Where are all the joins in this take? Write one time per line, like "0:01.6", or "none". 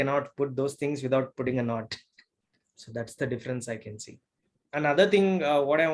0:04.6